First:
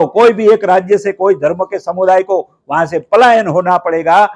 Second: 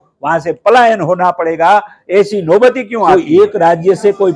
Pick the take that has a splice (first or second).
second